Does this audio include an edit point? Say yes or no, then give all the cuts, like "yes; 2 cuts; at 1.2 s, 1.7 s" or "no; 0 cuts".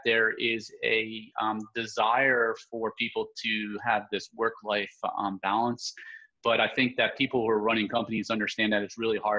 no; 0 cuts